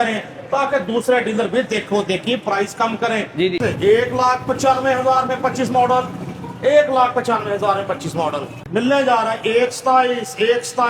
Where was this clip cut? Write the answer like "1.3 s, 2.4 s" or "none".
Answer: 3.6 s, 8.5 s